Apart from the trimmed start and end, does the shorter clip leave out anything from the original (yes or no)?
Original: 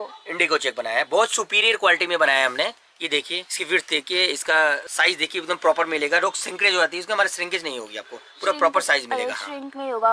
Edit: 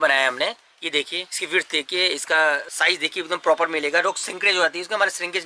no